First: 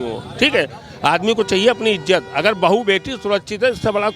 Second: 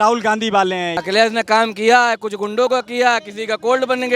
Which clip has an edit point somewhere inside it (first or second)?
second